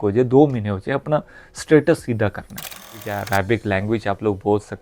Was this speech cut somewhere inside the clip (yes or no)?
yes